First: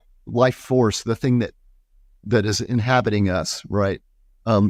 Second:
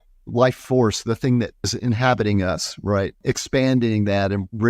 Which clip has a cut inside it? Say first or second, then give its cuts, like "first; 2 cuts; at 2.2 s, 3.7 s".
second; 2 cuts; at 1.7 s, 3.2 s